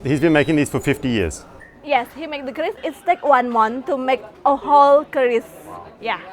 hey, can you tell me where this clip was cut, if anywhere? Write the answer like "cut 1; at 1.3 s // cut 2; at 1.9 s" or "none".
cut 1; at 2.8 s

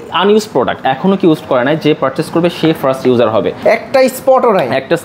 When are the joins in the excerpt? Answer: none

